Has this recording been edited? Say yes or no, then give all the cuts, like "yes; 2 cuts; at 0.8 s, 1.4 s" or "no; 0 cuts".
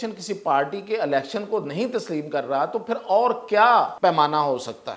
yes; 1 cut; at 3.9 s